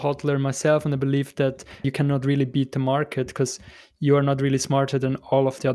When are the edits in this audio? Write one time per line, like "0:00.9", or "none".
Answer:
0:01.9

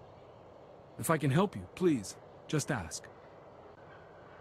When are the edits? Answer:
0:01.0
0:03.7

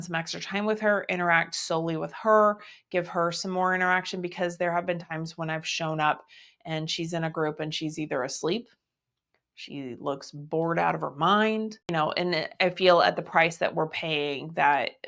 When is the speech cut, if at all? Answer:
0:11.8

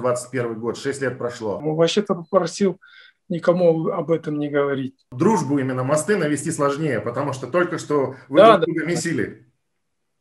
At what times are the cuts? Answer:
0:01.6
0:05.1

